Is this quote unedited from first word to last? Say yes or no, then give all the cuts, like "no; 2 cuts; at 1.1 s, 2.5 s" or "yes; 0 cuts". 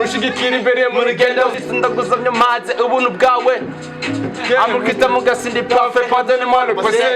no; 1 cut; at 1.6 s